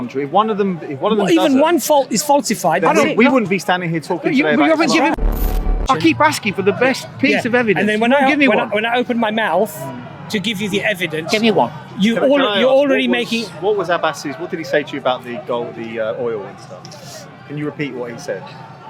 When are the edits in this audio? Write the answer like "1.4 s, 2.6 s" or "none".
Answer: 5.4 s